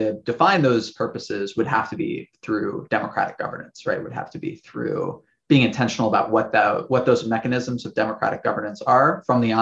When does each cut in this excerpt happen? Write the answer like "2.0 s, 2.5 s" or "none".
none